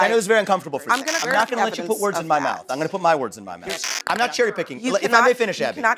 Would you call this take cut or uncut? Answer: cut